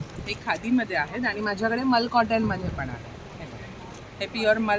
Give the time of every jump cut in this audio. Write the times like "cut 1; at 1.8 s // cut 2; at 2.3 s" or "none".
none